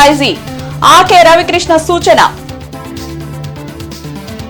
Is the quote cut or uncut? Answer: uncut